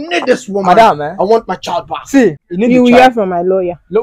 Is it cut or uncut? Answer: cut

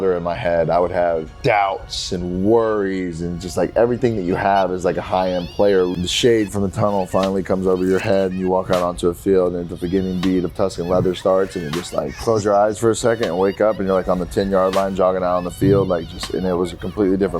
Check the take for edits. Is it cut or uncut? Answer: cut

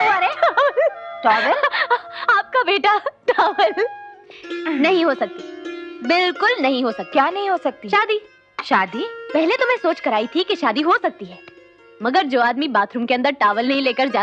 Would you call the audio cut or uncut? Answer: cut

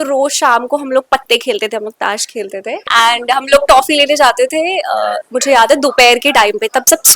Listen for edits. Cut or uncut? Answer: cut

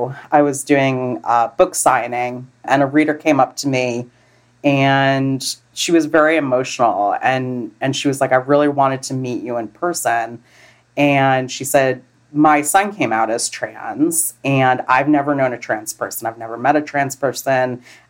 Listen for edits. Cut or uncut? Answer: cut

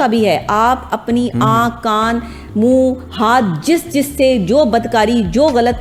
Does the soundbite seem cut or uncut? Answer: uncut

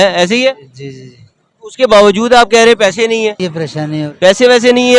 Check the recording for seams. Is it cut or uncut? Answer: cut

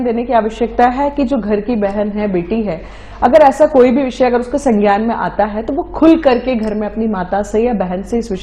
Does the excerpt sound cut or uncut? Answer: uncut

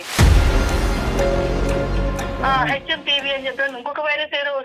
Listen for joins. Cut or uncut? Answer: cut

